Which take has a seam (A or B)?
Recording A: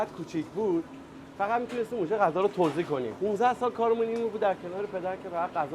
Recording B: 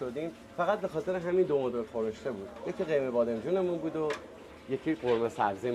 A